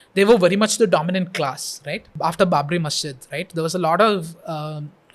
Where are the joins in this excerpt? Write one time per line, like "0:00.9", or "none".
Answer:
0:02.1